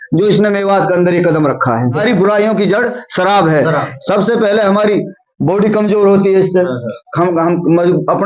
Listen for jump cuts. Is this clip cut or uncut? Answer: cut